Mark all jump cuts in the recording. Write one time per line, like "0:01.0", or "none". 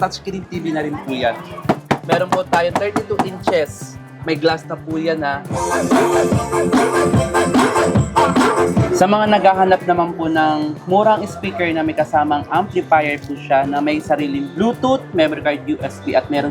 0:01.6
0:05.5
0:08.8